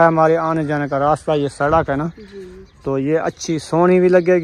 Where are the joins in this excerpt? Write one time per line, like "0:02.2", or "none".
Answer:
none